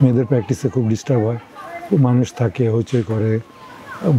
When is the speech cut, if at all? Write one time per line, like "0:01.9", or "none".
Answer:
none